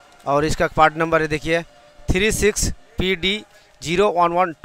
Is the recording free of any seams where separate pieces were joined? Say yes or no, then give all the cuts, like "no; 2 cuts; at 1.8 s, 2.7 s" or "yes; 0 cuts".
yes; 0 cuts